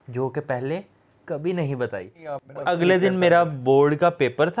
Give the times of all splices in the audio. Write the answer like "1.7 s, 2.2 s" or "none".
2.5 s